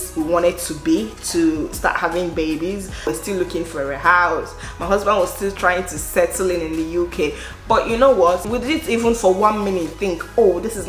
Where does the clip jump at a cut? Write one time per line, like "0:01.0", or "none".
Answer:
none